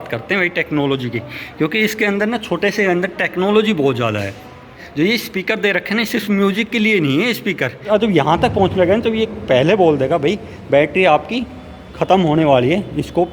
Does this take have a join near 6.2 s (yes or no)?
no